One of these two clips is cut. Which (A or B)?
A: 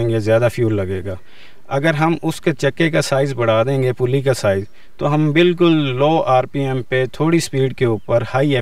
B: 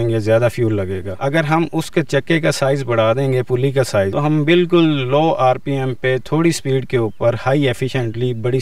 B